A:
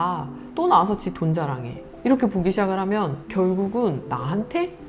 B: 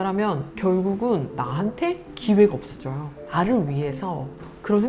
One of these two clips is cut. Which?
B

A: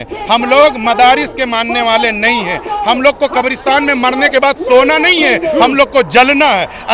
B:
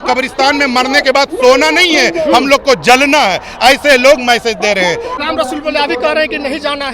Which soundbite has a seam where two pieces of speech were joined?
B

